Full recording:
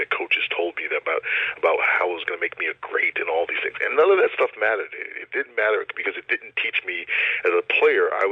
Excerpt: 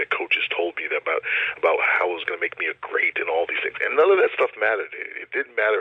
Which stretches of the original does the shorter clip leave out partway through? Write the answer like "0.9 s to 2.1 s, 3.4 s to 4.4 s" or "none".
none